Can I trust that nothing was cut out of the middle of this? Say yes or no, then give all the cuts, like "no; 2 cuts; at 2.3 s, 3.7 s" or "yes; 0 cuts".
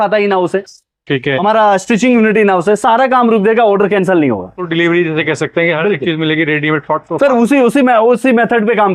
no; 1 cut; at 4.6 s